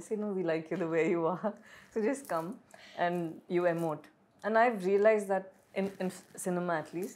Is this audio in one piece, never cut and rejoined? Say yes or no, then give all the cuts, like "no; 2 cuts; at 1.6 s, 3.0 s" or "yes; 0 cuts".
yes; 0 cuts